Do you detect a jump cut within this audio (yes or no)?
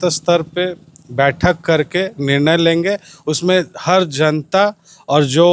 no